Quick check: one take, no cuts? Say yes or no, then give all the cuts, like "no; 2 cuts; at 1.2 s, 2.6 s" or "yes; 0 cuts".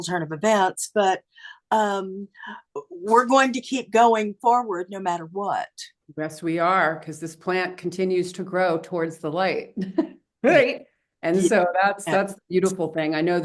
yes; 0 cuts